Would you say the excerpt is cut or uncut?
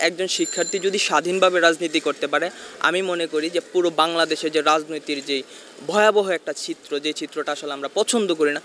uncut